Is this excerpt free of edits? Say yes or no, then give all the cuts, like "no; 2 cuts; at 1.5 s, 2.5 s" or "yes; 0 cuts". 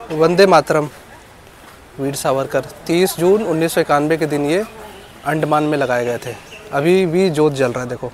yes; 0 cuts